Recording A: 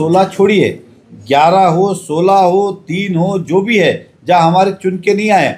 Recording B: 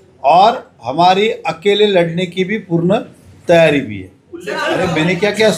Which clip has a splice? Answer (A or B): B